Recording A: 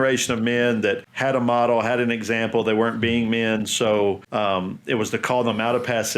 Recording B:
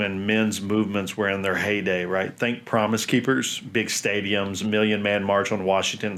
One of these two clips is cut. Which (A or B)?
A